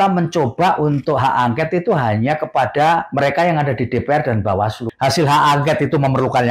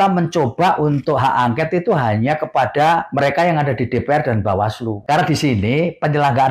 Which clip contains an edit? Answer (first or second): first